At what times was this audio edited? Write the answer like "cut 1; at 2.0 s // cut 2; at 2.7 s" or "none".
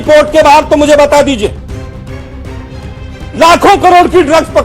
cut 1; at 1.6 s // cut 2; at 3.3 s